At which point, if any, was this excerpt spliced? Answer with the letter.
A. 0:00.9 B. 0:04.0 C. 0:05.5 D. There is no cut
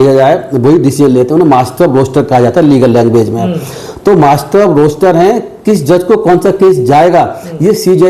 D